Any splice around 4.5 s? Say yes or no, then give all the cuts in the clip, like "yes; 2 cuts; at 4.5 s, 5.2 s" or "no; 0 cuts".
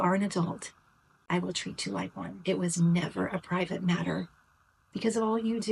no; 1 cut; at 2.3 s